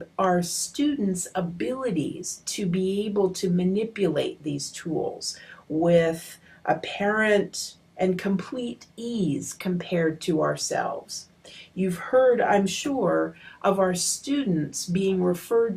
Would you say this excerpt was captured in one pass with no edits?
no; 1 cut; at 4.1 s

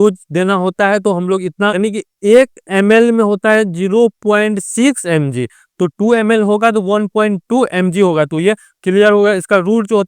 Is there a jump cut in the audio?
yes; 1 cut; at 1.8 s

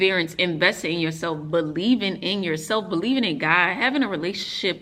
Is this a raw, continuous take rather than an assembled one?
yes; 0 cuts

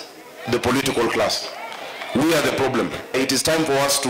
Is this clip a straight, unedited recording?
yes; 0 cuts

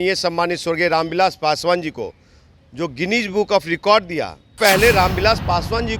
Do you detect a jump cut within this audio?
yes; 1 cut; at 4.6 s

